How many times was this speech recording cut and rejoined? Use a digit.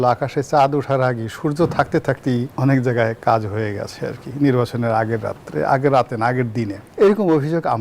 2